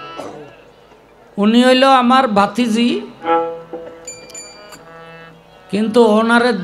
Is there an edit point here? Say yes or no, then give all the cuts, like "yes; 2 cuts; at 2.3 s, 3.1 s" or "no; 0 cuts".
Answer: no; 0 cuts